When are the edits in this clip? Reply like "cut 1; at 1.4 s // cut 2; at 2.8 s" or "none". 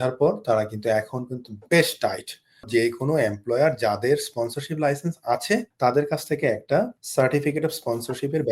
cut 1; at 2.7 s // cut 2; at 5.7 s // cut 3; at 7.0 s